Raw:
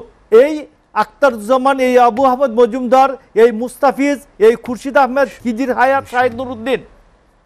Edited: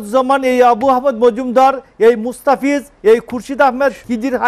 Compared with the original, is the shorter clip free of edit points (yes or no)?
yes